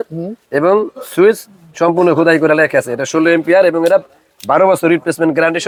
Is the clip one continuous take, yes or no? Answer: yes